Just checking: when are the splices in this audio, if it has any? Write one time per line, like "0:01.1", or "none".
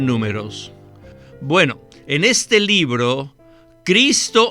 0:01.1
0:03.4